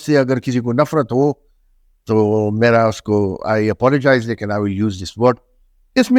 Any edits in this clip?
no; 0 cuts

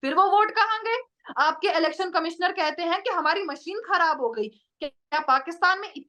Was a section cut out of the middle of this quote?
no; 0 cuts

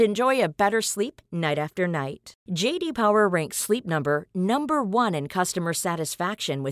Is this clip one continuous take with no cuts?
yes; 0 cuts

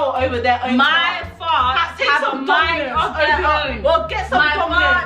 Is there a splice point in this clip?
no; 0 cuts

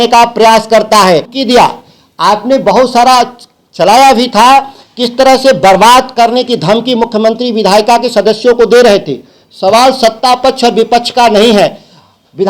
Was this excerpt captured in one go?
no; 1 cut; at 1.3 s

